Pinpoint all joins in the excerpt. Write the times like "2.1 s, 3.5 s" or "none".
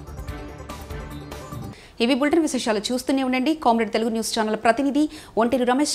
none